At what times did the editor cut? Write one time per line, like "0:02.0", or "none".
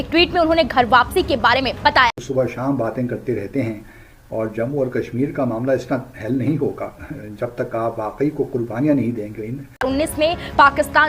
0:02.2
0:09.9